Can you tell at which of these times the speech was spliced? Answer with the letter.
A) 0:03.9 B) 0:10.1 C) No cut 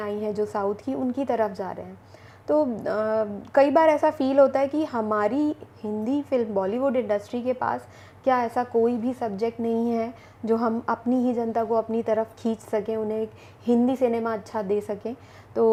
C